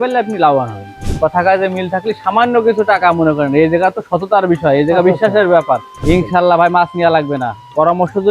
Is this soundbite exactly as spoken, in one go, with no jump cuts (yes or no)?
no